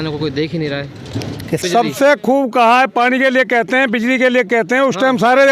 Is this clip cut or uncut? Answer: cut